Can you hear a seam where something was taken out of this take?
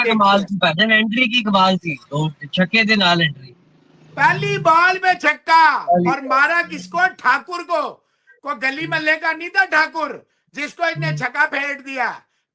no; 0 cuts

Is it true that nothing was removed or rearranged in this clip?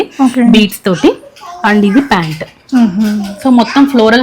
yes; 0 cuts

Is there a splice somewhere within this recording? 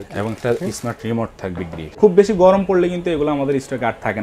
yes; 1 cut; at 2.0 s

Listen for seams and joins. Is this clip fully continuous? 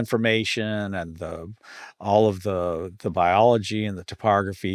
yes; 0 cuts

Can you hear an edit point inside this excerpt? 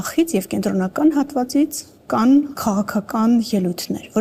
no; 0 cuts

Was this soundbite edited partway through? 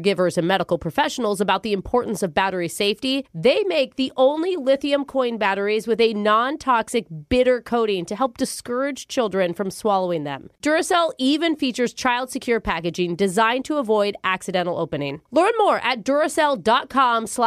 no; 0 cuts

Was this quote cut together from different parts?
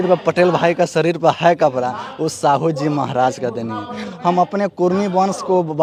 no; 0 cuts

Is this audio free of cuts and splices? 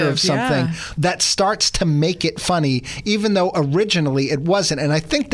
yes; 0 cuts

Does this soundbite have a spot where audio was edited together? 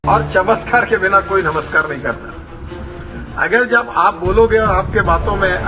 yes; 1 cut; at 3.0 s

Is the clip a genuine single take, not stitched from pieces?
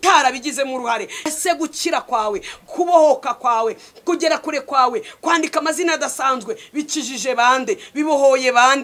no; 1 cut; at 1.3 s

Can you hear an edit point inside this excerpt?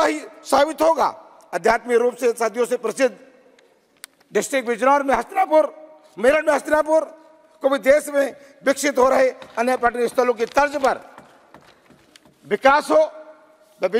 no; 0 cuts

